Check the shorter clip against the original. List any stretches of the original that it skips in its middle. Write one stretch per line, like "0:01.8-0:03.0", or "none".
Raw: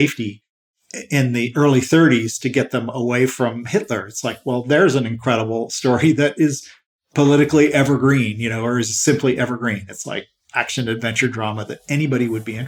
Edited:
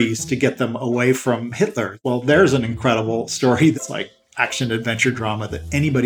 0:04.1-0:04.4
0:06.2-0:09.9